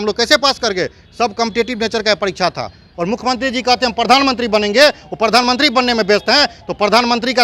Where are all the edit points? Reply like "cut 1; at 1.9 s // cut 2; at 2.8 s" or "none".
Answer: cut 1; at 2.9 s